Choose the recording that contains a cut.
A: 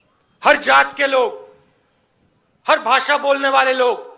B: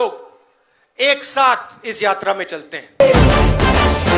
B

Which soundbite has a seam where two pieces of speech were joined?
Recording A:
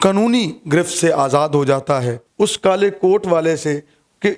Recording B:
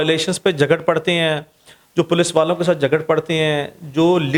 A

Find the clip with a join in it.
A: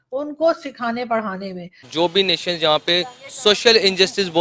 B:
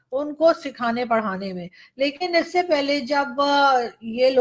A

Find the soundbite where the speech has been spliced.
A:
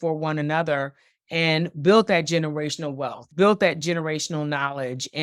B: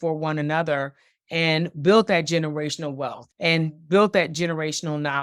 A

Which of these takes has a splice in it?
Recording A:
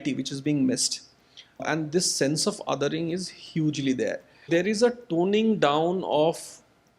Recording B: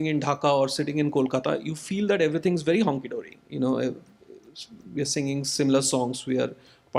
A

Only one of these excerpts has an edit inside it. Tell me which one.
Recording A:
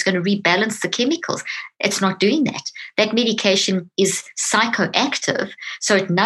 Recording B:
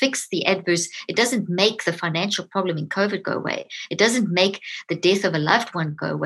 A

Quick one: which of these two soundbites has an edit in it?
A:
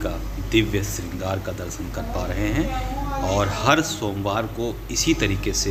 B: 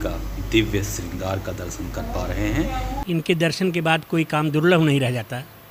B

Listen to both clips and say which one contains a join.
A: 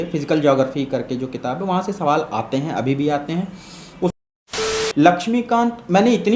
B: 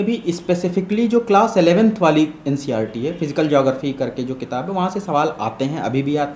A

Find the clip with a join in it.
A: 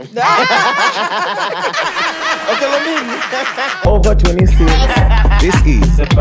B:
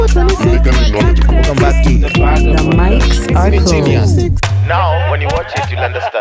A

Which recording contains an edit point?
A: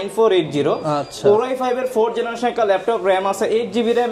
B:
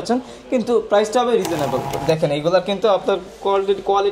B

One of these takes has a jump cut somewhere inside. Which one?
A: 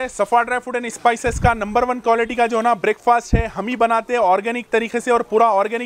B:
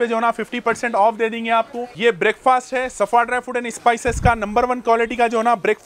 B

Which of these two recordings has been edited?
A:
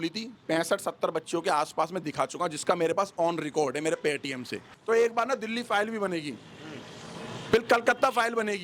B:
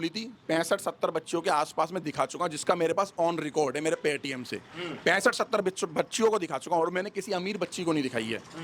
A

